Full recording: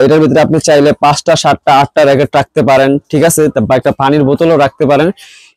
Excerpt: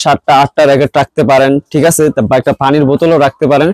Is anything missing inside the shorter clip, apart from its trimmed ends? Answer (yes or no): no